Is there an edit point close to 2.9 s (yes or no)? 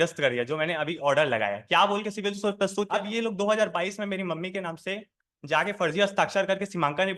yes